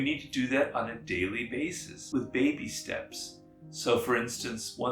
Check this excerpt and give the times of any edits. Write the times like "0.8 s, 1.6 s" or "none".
1.9 s